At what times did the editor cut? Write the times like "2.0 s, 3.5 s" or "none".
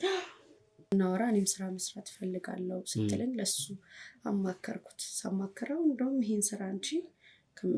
1.2 s